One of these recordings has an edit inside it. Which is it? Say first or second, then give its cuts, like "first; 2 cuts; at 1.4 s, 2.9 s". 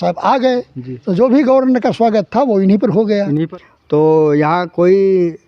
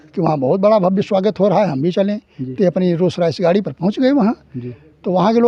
first; 1 cut; at 3.5 s